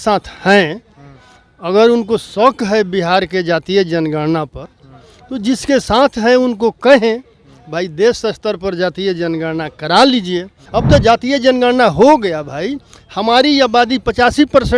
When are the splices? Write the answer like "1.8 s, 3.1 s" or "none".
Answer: 10.6 s